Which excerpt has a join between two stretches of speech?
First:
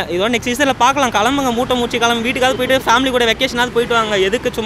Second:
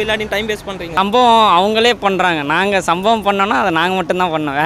second; 1 cut; at 0.9 s

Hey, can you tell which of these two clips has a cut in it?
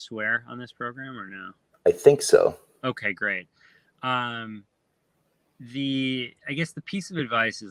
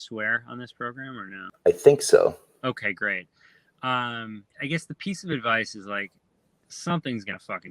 second; 2 cuts; at 1.4 s, 4.5 s

